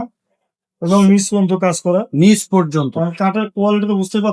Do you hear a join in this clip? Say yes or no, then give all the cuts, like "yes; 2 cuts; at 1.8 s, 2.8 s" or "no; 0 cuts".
no; 0 cuts